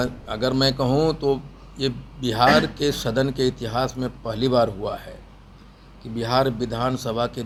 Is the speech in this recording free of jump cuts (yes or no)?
yes